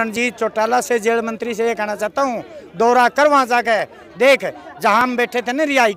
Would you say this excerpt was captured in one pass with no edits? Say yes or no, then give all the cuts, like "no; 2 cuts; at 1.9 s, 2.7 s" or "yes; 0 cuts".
yes; 0 cuts